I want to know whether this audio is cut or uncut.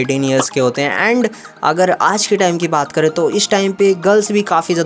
uncut